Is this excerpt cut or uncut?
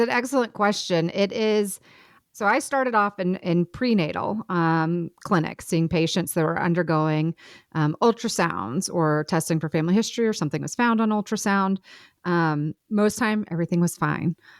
uncut